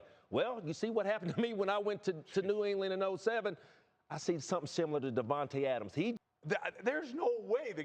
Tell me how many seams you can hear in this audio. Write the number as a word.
one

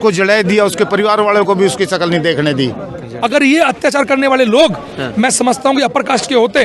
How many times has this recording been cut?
one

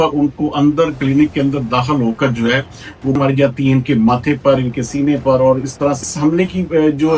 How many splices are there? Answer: two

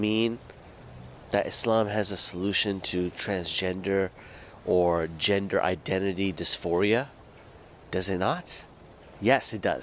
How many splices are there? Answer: zero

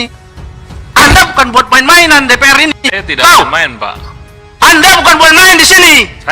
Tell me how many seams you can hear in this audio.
zero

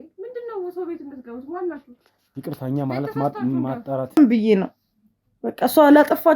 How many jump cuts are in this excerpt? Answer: one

